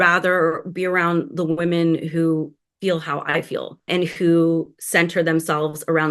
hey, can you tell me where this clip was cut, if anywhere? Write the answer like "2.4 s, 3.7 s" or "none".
3.9 s